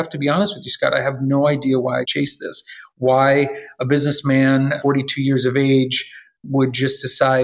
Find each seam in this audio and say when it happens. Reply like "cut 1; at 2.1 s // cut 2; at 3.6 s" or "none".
cut 1; at 2.1 s // cut 2; at 4.8 s